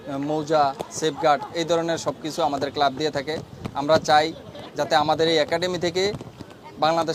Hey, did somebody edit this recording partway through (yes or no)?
no